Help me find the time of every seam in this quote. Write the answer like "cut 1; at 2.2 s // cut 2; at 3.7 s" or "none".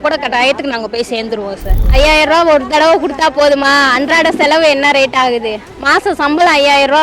cut 1; at 1.7 s